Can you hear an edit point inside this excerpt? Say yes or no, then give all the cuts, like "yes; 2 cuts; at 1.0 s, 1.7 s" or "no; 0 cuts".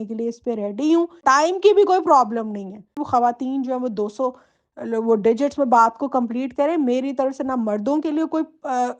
yes; 2 cuts; at 1.2 s, 3.0 s